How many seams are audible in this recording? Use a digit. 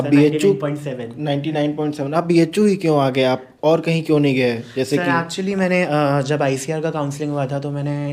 0